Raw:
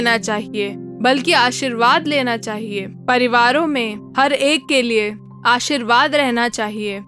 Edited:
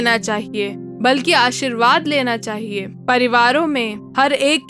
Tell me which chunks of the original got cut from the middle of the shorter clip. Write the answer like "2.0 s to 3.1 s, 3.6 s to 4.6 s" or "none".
none